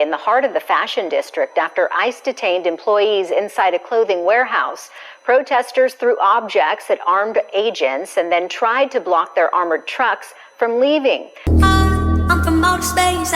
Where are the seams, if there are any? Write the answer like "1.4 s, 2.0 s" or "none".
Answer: 11.3 s